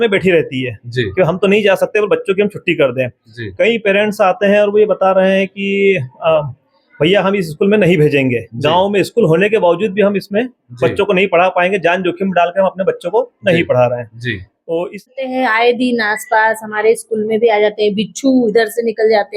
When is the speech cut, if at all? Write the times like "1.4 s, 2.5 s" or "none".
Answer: 15.1 s